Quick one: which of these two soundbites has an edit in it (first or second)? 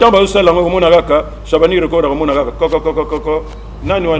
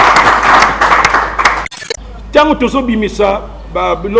second